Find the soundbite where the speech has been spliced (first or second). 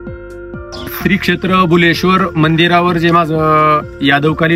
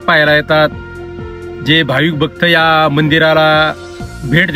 first